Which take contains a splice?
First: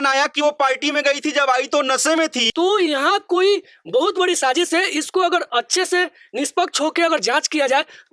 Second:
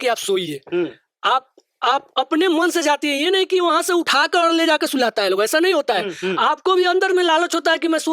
first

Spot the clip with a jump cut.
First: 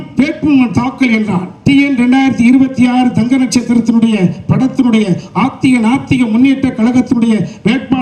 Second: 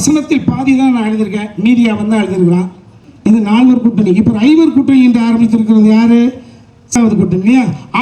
second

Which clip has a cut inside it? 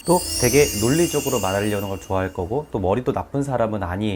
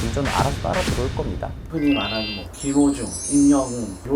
second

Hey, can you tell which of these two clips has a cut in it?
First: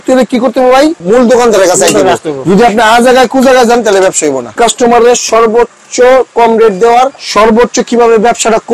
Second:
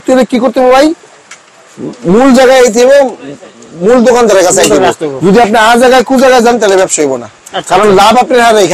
first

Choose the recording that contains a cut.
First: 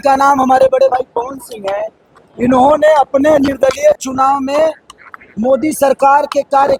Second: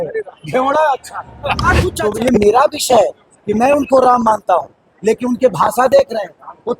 second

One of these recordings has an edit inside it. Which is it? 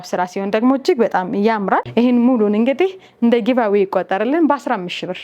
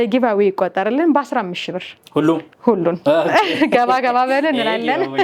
first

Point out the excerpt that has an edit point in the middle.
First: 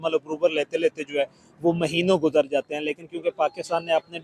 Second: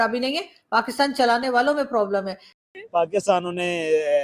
second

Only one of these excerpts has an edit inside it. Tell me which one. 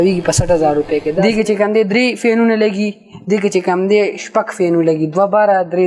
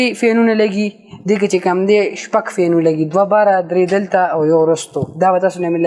first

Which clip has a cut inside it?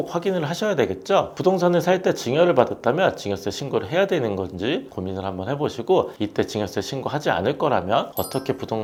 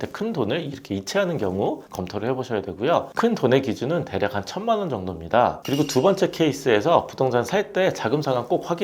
second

